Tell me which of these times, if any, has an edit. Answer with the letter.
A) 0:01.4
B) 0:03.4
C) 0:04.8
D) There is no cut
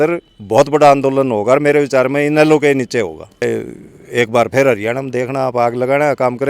B